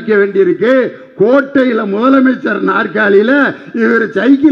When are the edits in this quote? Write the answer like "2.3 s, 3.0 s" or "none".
none